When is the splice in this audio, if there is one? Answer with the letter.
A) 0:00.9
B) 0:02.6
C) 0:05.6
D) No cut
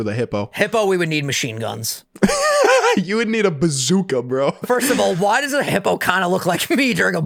C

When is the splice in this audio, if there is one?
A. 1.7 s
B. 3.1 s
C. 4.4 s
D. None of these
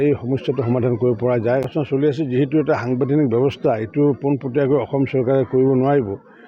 A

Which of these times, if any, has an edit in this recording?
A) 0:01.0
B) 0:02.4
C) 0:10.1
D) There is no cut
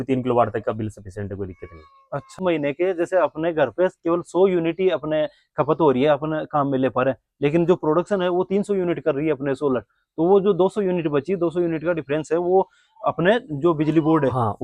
B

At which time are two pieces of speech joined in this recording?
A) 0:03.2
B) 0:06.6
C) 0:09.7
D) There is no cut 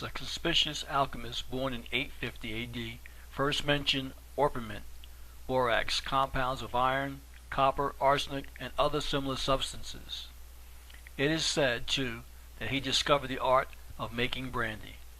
B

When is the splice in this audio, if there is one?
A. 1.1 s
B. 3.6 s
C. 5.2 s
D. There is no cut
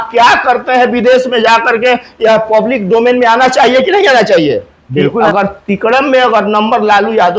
C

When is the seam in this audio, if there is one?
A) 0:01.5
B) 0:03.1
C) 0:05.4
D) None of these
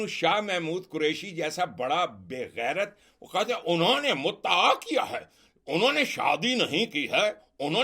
D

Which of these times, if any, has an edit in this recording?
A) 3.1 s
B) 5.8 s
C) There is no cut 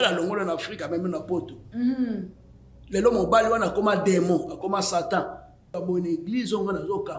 B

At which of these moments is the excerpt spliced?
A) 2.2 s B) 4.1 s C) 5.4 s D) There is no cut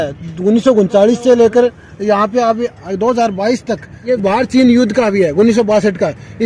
B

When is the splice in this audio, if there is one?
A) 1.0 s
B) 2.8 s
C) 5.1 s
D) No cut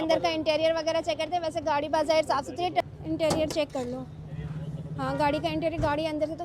B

